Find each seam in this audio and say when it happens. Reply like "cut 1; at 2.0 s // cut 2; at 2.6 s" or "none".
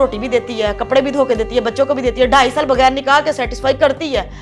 none

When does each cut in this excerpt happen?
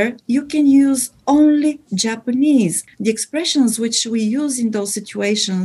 cut 1; at 2.8 s

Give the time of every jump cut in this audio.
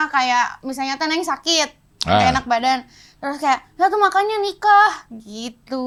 none

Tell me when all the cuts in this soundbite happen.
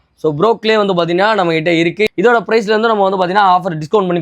cut 1; at 2.1 s

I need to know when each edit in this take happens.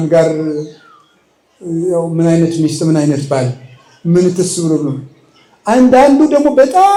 none

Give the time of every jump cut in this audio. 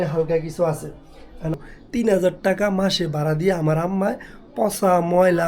cut 1; at 1.5 s

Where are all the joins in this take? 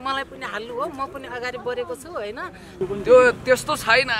cut 1; at 2.8 s

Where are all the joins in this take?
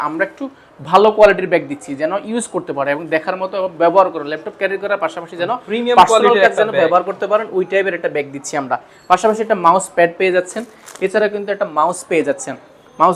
none

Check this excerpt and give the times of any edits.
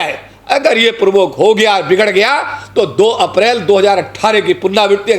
none

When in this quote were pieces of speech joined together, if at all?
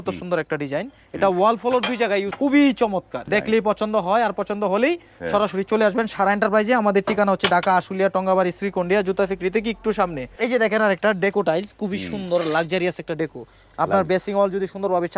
cut 1; at 2.3 s // cut 2; at 3.2 s // cut 3; at 10.2 s

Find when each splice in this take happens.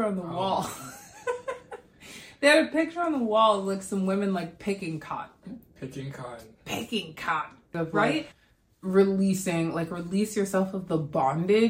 cut 1; at 8.4 s

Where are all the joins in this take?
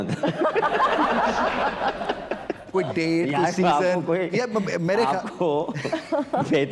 none

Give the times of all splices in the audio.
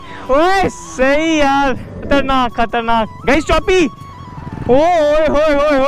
cut 1; at 1.9 s

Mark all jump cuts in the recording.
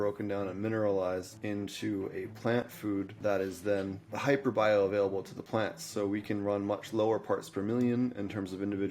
cut 1; at 1.3 s // cut 2; at 3.1 s // cut 3; at 4.1 s

